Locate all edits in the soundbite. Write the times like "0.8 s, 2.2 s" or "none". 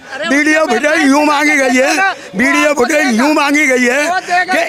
none